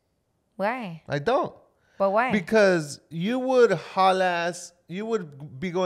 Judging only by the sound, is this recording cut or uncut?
uncut